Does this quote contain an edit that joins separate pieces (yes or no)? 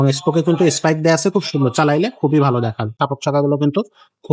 yes